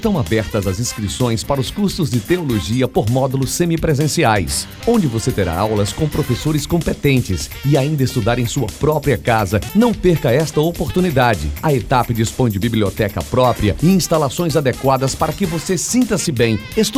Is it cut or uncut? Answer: uncut